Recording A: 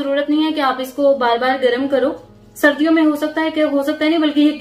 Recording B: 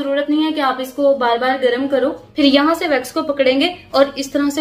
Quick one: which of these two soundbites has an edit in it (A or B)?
B